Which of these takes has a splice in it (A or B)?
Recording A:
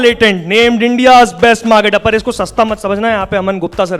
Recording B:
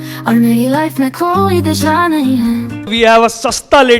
B